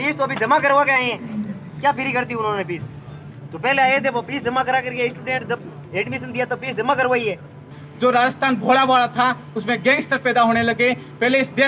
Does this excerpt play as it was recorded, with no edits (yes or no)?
no